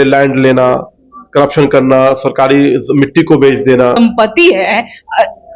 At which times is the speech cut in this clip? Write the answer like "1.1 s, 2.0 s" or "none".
4.0 s